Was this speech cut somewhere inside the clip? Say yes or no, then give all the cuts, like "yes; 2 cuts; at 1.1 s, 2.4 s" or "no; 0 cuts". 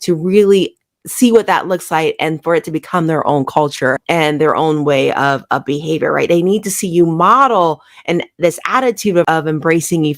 no; 0 cuts